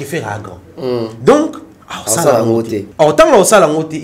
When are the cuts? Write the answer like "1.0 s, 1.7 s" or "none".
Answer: 2.8 s